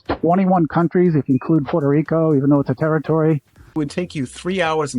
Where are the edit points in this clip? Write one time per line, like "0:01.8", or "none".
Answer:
0:03.7

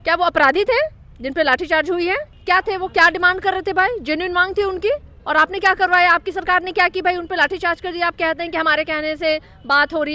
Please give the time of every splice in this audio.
0:02.3
0:05.1

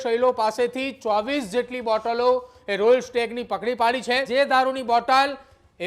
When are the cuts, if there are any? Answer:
0:04.3

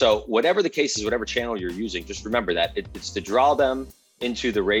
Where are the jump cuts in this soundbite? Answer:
none

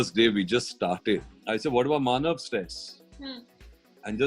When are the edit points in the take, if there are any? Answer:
0:01.3

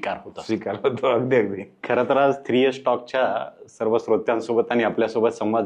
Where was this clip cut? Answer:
none

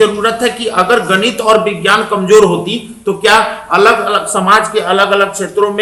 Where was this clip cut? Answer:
none

